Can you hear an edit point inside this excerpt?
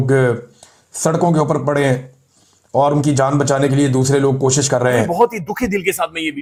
no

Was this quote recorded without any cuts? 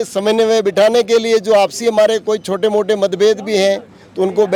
yes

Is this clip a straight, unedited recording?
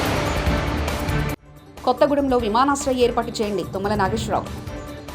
no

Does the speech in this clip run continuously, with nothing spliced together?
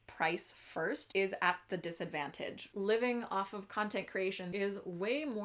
no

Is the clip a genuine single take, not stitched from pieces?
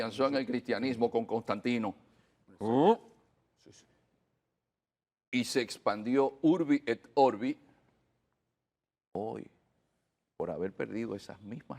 yes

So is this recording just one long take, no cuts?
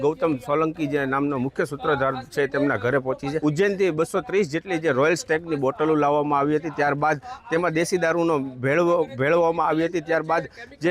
no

